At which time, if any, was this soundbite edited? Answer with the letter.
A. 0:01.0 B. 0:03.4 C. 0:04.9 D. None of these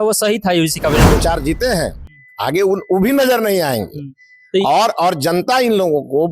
A